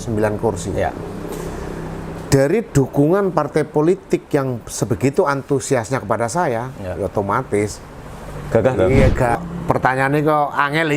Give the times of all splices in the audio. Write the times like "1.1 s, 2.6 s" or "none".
9.4 s